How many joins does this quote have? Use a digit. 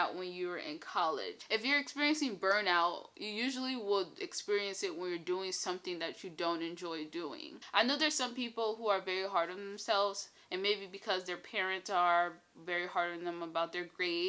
2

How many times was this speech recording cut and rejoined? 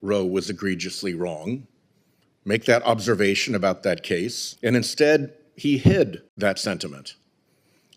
2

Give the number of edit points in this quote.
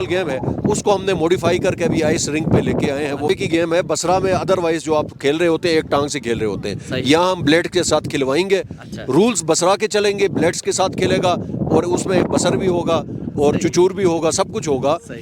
0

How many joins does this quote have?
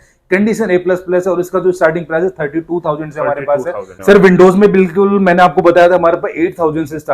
1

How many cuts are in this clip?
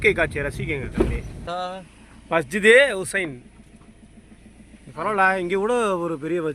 1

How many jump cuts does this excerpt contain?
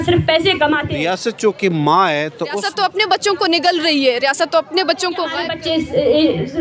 3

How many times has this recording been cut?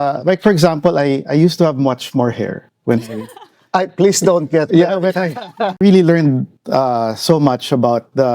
1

